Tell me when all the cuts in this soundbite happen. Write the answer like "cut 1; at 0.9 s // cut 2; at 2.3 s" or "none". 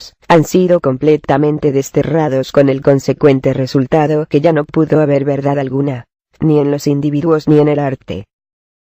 cut 1; at 2.1 s